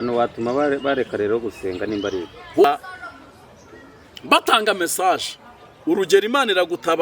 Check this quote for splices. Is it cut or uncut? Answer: cut